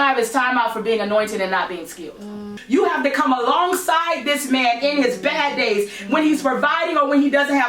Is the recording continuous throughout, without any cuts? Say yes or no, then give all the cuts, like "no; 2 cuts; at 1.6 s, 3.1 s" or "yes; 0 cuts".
no; 1 cut; at 2.6 s